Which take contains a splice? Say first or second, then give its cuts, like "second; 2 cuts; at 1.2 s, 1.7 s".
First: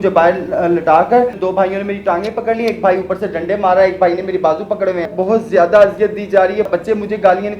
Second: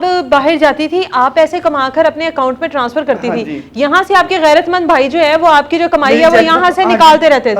first; 3 cuts; at 1.4 s, 5.1 s, 6.7 s